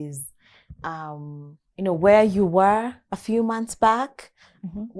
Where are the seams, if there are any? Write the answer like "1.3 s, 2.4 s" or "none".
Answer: none